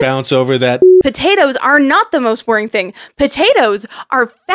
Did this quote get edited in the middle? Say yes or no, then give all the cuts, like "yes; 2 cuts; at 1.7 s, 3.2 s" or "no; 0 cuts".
yes; 1 cut; at 0.9 s